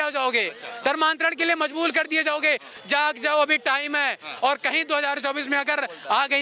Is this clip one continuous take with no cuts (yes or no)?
no